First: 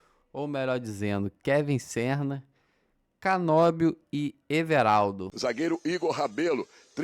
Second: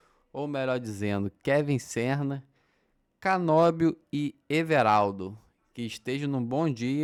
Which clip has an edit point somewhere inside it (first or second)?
first